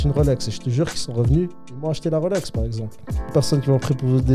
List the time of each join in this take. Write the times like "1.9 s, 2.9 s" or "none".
3.3 s